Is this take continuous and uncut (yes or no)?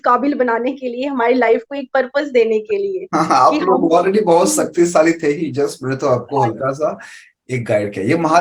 yes